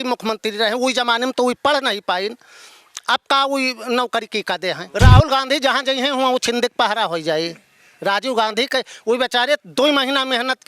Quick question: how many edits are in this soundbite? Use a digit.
1